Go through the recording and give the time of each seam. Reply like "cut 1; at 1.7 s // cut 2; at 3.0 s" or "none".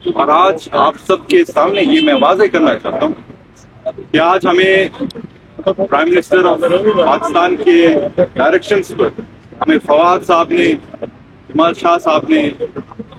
none